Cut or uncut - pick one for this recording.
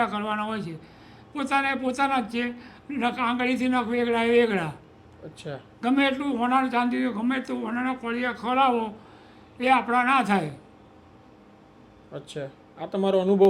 uncut